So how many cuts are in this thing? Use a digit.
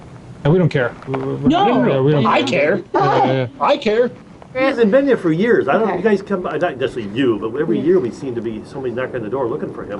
1